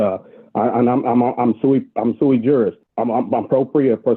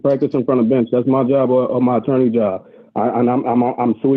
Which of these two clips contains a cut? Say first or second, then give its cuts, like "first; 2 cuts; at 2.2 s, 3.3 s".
first; 1 cut; at 2.8 s